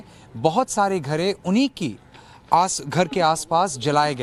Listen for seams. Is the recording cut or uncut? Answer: uncut